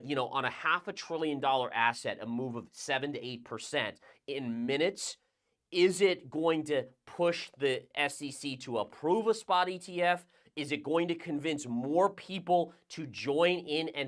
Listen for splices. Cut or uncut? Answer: uncut